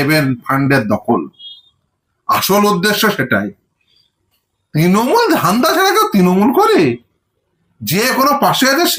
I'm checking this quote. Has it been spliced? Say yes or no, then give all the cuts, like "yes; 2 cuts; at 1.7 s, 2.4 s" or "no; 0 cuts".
no; 0 cuts